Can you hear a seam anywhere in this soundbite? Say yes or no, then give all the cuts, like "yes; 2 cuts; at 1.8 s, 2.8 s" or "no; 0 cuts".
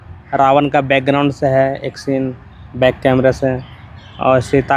no; 0 cuts